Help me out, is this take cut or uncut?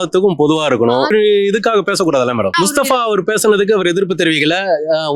cut